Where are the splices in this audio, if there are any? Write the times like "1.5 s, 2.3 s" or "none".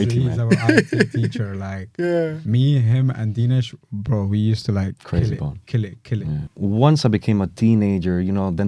6.4 s